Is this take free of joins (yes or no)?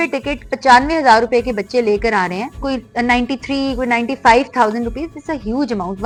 yes